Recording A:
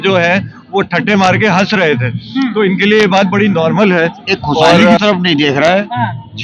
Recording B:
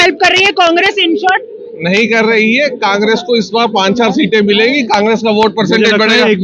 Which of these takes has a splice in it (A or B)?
A